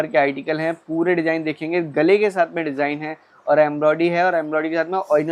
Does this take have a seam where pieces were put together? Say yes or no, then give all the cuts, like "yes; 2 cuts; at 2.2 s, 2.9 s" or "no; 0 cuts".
no; 0 cuts